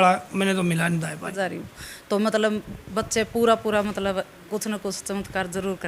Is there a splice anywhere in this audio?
yes; 1 cut; at 1.3 s

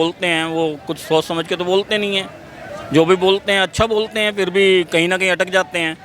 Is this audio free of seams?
yes; 0 cuts

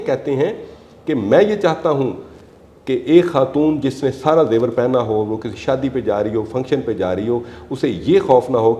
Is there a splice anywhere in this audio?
no; 0 cuts

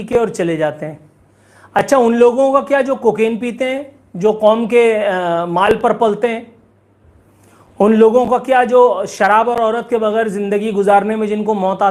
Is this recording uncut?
yes; 0 cuts

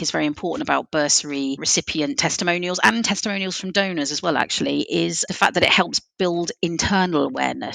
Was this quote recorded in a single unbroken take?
no; 2 cuts; at 1.6 s, 5.2 s

